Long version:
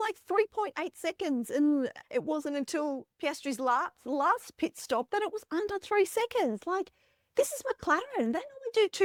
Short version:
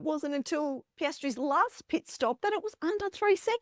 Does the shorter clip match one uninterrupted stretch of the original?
no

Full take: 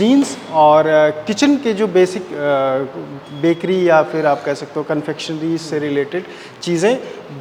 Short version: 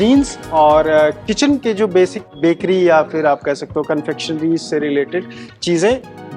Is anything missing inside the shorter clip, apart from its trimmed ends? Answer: yes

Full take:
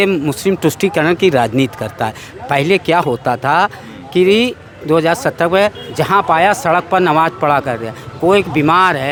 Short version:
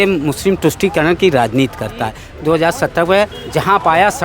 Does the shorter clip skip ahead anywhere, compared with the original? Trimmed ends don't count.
yes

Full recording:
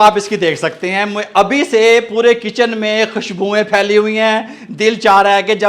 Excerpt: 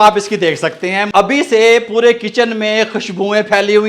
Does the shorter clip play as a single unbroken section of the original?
no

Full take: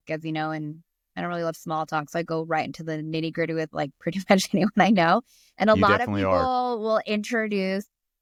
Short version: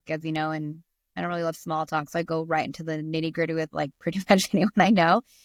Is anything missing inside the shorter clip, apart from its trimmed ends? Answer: no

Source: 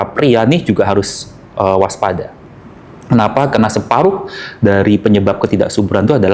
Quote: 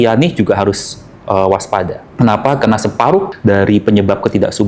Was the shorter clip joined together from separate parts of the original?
yes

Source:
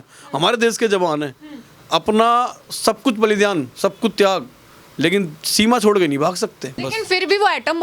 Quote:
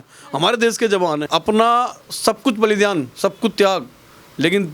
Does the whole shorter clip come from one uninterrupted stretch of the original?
no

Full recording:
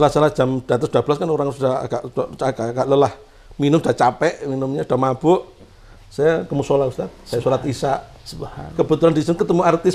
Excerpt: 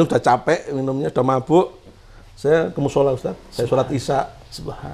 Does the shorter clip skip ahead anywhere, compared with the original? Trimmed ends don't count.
no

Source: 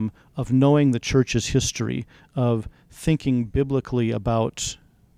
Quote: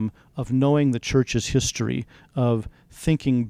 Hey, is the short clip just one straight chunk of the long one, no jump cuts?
yes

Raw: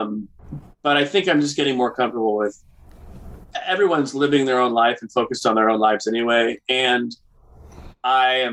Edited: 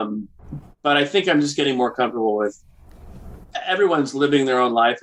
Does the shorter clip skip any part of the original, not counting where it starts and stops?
no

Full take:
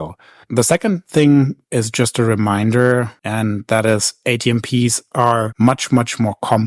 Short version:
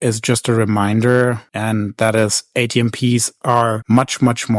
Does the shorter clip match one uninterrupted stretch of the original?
yes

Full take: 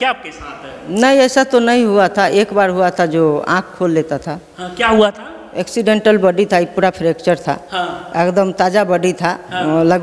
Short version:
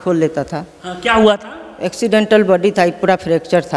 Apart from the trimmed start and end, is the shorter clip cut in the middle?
no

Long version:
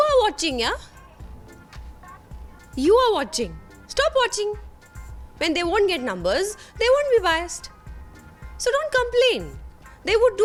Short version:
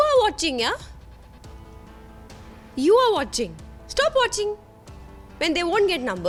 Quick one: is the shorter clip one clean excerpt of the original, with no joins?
yes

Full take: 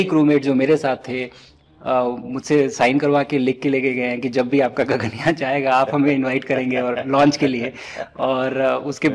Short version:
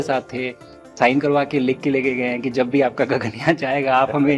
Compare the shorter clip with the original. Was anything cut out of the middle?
yes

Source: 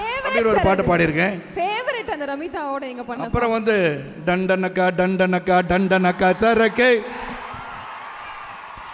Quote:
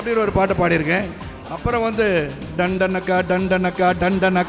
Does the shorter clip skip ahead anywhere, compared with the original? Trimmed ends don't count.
yes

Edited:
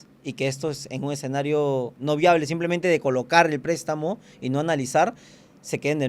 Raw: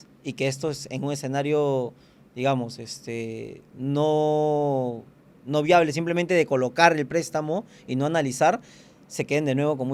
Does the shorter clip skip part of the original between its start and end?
yes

